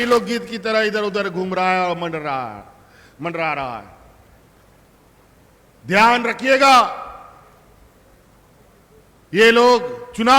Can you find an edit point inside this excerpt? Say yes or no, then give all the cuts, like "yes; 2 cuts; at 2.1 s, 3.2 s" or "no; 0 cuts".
no; 0 cuts